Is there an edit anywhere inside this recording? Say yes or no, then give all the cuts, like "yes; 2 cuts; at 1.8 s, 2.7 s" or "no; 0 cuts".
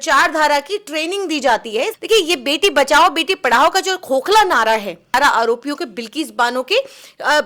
yes; 2 cuts; at 2.0 s, 5.1 s